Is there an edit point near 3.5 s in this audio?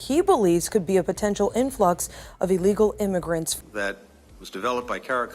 yes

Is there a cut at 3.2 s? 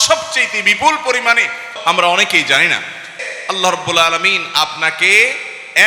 yes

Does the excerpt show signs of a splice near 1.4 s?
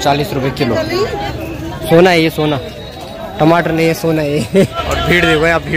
yes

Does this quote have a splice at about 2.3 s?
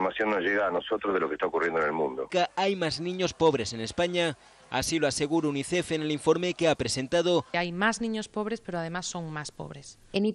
yes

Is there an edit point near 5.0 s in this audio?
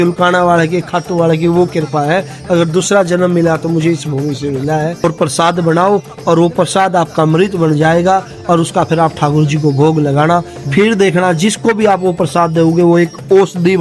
yes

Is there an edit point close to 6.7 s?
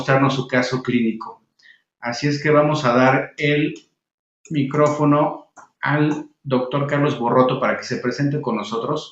yes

